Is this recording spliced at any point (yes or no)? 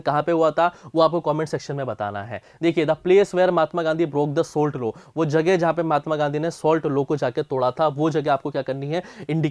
no